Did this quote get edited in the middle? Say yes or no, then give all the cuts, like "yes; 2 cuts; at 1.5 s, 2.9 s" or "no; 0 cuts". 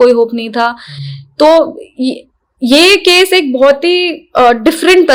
no; 0 cuts